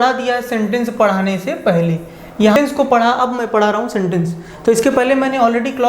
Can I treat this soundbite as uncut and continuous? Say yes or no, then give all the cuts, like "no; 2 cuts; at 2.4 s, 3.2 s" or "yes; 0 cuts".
no; 1 cut; at 2.5 s